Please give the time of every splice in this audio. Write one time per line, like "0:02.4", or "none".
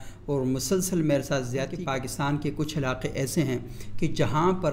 0:01.8